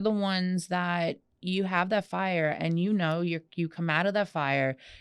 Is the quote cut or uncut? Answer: uncut